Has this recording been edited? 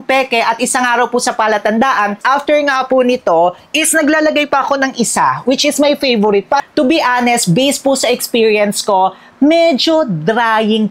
yes; 2 cuts; at 2.2 s, 6.6 s

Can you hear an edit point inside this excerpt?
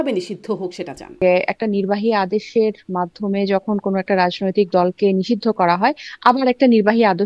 yes; 1 cut; at 1.2 s

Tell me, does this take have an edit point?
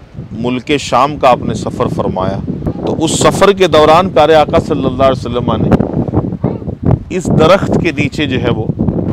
yes; 1 cut; at 2.7 s

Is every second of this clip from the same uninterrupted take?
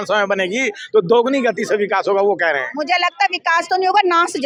yes; 0 cuts

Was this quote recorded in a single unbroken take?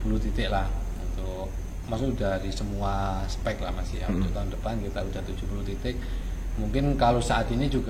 yes; 0 cuts

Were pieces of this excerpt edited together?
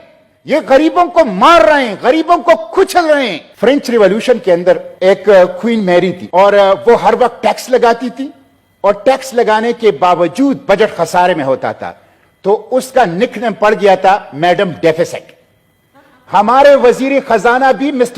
yes; 3 cuts; at 3.4 s, 4.9 s, 6.2 s

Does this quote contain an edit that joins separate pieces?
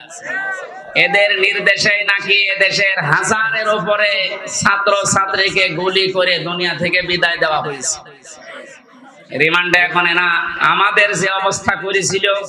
no; 0 cuts

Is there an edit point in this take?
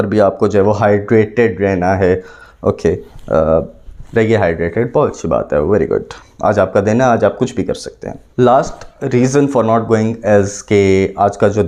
no; 0 cuts

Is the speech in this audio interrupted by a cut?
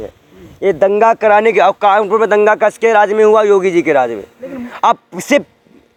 no; 0 cuts

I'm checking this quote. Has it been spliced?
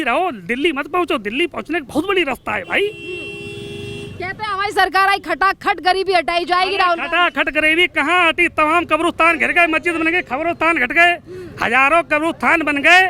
no; 0 cuts

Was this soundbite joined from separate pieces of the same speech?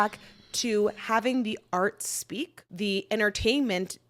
yes; 1 cut; at 2.6 s

